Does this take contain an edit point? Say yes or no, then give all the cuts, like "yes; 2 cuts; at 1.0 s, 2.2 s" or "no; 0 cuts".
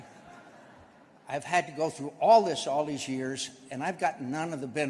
no; 0 cuts